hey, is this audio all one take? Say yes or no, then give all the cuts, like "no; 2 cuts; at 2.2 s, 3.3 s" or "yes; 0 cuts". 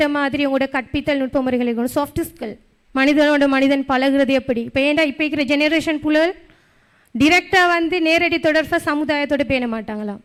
yes; 0 cuts